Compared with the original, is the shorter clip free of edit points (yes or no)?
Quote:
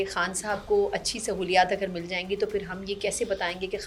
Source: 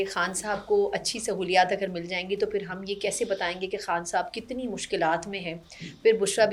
yes